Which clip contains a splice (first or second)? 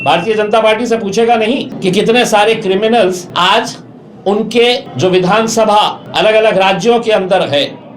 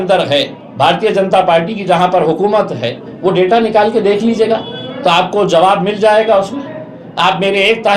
first